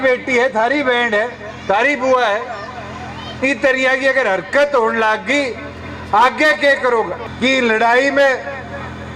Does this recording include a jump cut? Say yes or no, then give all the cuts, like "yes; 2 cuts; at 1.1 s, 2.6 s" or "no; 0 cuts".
yes; 1 cut; at 7.2 s